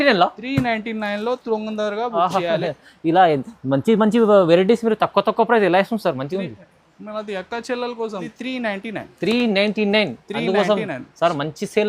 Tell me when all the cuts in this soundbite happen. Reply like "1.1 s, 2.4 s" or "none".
8.3 s